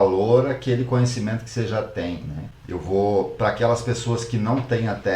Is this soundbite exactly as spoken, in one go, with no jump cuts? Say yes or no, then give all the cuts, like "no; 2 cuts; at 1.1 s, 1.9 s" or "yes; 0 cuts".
no; 1 cut; at 2.5 s